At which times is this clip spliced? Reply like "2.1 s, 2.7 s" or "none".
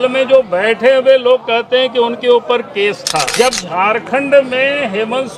3.3 s